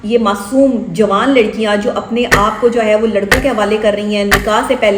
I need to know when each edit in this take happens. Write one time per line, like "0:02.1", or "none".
none